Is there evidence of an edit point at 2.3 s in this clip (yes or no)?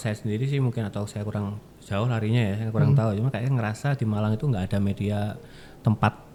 no